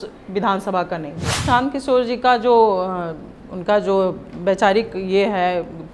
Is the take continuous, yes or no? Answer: no